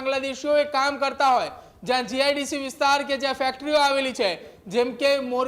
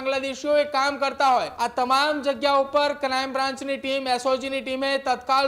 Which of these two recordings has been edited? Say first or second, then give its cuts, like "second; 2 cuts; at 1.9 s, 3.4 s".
second; 1 cut; at 1.5 s